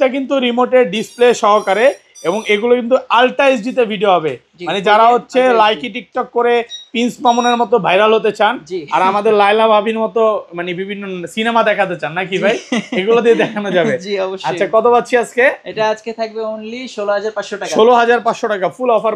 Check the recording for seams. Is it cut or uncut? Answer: uncut